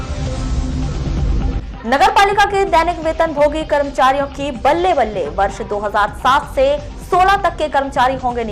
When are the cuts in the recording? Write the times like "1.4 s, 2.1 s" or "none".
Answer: 1.3 s